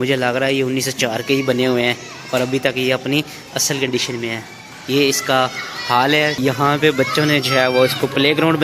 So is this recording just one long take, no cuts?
no; 1 cut; at 6.4 s

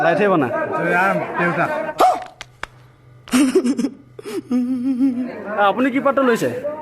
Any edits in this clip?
yes; 1 cut; at 5.3 s

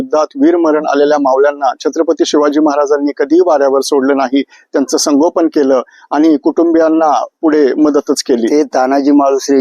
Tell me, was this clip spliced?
yes; 1 cut; at 8.5 s

